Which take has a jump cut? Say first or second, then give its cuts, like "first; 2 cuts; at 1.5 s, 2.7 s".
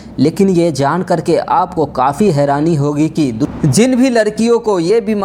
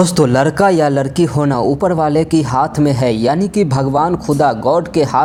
first; 1 cut; at 3.5 s